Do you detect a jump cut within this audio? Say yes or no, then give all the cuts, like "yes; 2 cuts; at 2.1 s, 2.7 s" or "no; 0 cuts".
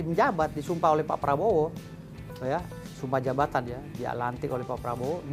no; 0 cuts